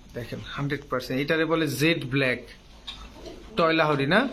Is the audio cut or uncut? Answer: uncut